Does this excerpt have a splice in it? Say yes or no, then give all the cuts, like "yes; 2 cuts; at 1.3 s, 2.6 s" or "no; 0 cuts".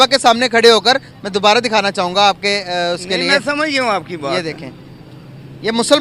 no; 0 cuts